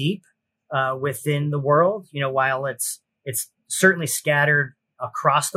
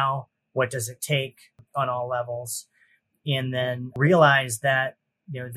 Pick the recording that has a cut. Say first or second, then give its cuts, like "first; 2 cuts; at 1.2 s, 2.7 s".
second; 2 cuts; at 1.6 s, 3.9 s